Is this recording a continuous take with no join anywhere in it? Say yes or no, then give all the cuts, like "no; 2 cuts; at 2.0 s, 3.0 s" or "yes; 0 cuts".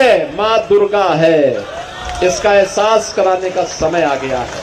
yes; 0 cuts